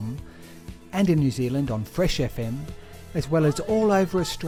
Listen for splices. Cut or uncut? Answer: uncut